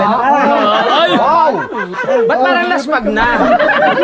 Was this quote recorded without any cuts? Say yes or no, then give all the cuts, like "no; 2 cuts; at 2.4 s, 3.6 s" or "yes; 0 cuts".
yes; 0 cuts